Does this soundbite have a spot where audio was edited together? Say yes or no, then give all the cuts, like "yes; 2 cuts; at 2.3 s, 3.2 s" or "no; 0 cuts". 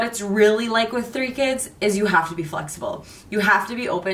no; 0 cuts